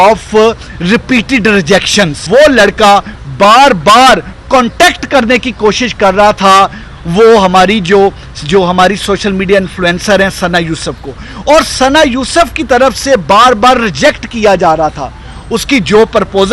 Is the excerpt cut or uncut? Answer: cut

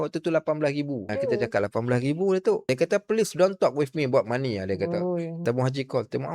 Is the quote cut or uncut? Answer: cut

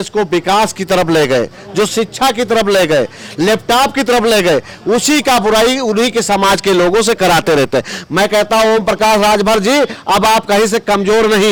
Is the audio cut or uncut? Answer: uncut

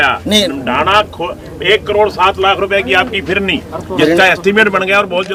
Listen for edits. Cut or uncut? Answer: uncut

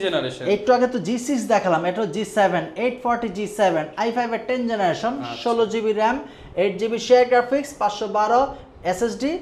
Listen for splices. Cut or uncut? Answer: uncut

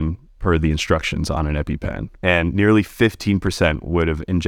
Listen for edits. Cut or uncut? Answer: cut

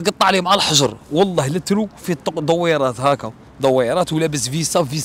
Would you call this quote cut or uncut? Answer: uncut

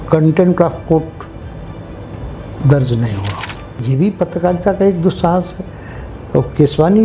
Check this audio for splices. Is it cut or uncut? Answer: cut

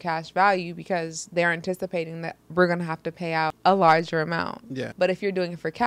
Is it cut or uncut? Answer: cut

